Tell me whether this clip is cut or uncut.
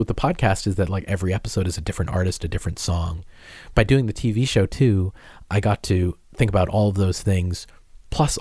cut